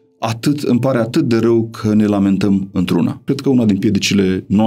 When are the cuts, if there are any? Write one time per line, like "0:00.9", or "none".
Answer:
0:03.2